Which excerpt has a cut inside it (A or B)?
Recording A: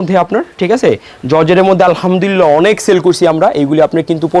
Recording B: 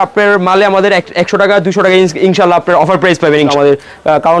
B